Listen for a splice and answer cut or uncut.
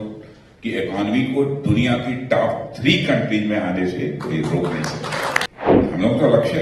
cut